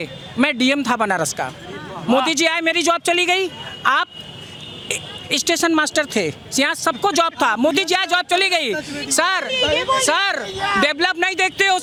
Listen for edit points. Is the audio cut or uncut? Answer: uncut